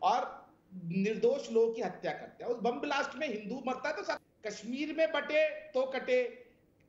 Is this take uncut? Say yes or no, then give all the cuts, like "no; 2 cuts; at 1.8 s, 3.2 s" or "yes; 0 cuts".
no; 1 cut; at 4.3 s